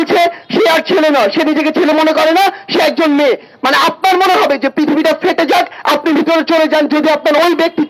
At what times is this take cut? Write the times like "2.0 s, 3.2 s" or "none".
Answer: none